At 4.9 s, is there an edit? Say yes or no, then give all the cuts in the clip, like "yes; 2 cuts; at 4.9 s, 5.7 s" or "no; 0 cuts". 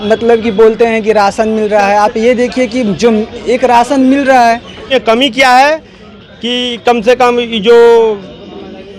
yes; 1 cut; at 4.9 s